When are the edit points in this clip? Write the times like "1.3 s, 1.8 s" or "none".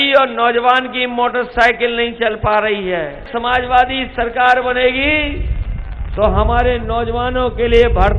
3.3 s